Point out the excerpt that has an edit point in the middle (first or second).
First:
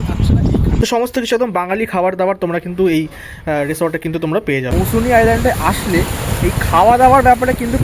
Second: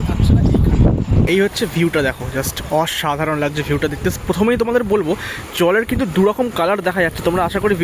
first